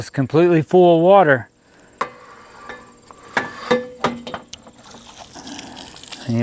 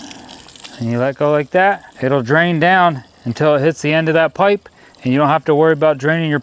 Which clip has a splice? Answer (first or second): second